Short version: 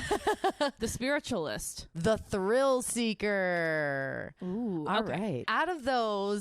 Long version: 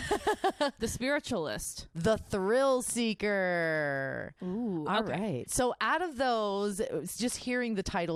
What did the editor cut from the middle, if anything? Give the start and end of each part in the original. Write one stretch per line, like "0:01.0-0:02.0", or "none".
0:05.5-0:05.8